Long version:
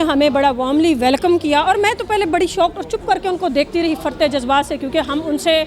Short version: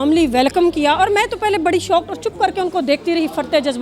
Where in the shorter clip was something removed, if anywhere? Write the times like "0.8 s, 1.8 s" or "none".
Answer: none